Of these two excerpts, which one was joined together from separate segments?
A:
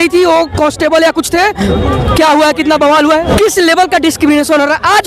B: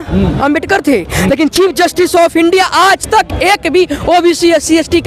A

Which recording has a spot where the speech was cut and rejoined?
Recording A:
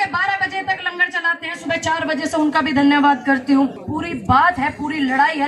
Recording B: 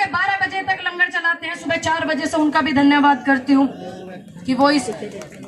A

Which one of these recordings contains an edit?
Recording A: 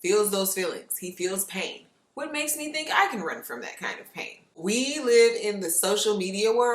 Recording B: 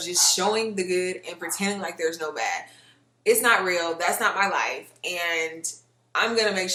A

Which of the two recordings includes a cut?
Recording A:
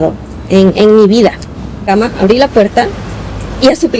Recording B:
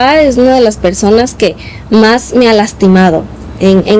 A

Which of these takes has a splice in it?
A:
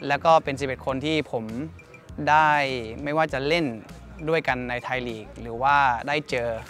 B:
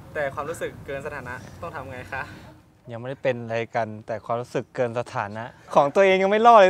B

